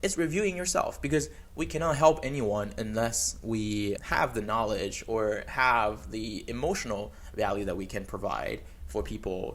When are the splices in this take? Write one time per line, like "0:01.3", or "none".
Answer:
none